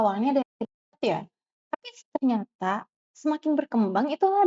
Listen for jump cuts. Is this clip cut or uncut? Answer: uncut